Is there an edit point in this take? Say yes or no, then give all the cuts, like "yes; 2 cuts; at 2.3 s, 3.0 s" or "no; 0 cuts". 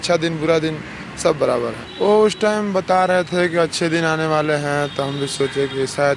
yes; 1 cut; at 1.8 s